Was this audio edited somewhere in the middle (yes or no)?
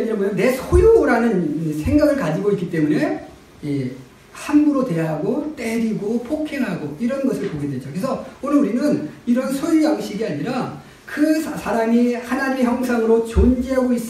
no